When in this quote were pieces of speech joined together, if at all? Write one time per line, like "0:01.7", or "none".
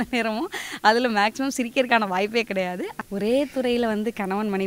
0:02.9